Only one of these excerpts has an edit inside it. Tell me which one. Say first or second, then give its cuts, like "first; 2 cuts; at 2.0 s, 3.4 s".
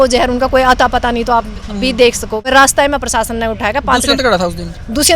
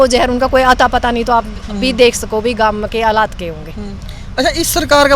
first; 1 cut; at 2.5 s